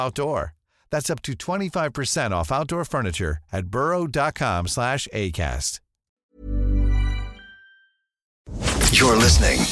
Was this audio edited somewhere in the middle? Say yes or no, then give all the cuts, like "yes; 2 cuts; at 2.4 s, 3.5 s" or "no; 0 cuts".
yes; 1 cut; at 8.5 s